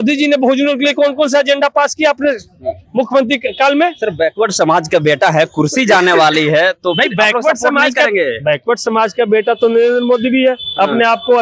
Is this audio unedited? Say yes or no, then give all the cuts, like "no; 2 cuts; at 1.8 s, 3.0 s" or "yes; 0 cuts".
yes; 0 cuts